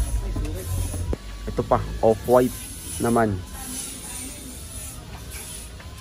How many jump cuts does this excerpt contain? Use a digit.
1